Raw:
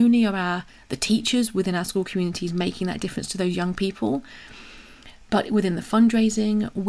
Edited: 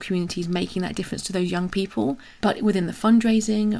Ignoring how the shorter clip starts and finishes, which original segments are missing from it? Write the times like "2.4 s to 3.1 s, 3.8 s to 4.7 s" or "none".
4.3 s to 5.2 s